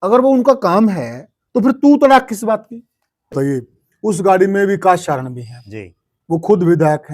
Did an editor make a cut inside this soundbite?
yes; 1 cut; at 3.3 s

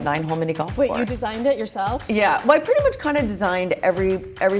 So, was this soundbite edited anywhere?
yes; 1 cut; at 2.0 s

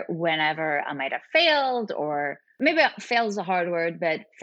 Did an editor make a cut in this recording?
yes; 1 cut; at 2.4 s

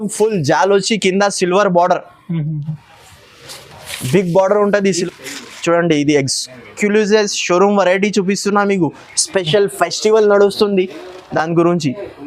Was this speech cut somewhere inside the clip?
yes; 1 cut; at 5.0 s

